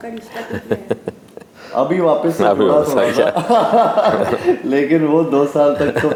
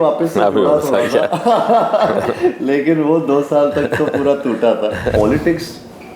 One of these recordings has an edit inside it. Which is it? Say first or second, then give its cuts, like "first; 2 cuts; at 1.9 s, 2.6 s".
second; 1 cut; at 5.1 s